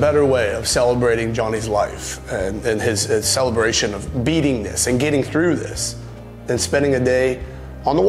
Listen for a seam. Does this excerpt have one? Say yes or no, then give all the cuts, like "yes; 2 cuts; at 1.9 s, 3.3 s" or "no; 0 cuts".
no; 0 cuts